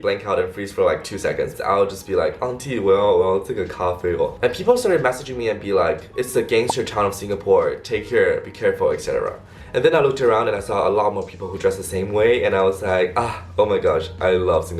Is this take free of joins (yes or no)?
no